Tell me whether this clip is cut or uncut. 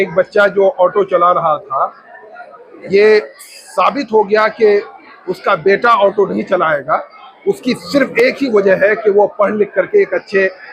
uncut